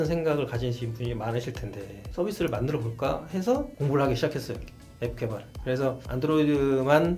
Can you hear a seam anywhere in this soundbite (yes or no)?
no